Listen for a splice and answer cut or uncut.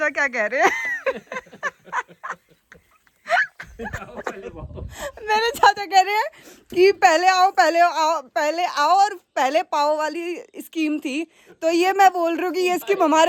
uncut